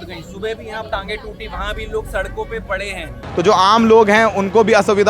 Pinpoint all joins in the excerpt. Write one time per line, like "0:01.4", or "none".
0:03.3